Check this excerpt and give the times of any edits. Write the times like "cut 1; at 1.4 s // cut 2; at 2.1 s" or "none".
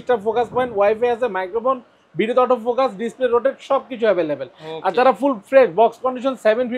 none

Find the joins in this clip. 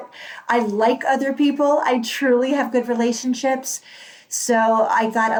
none

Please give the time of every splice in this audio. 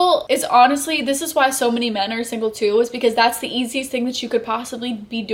none

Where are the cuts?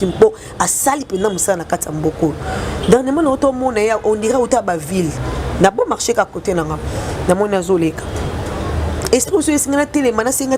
none

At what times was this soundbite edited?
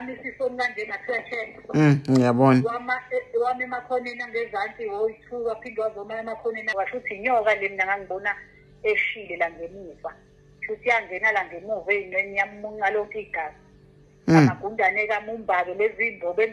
cut 1; at 6.7 s

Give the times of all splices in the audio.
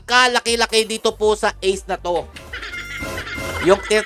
none

